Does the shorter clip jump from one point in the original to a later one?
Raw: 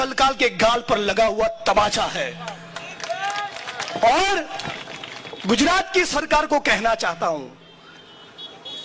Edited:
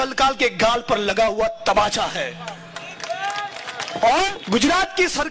yes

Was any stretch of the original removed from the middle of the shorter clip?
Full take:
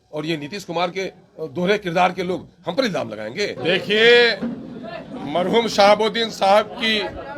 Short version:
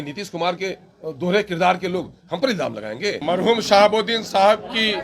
yes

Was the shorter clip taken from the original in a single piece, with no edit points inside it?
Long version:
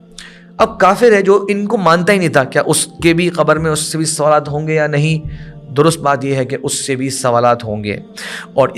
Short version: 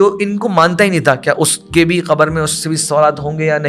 yes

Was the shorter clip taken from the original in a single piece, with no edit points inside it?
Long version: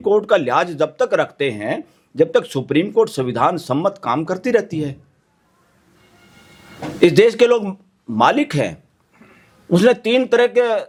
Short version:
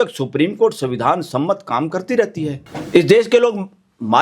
no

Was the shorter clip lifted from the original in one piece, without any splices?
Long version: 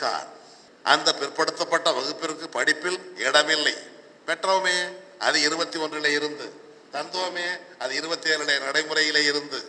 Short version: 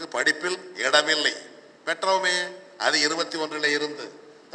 yes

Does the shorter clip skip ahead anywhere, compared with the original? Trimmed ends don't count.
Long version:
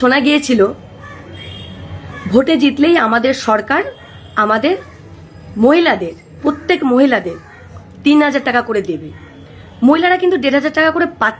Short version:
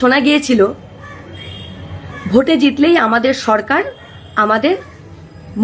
no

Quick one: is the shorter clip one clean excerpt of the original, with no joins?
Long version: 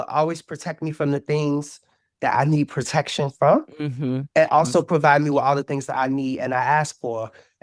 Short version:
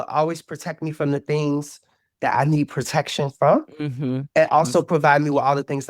yes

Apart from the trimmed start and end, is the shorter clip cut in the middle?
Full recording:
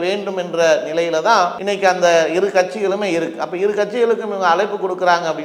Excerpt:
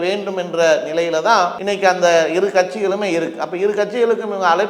no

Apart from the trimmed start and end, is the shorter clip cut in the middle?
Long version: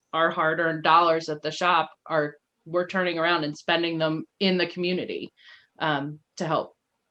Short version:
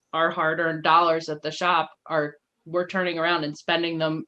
no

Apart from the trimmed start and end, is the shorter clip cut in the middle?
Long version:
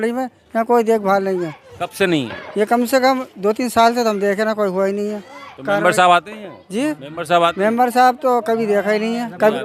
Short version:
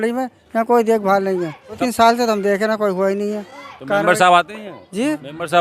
yes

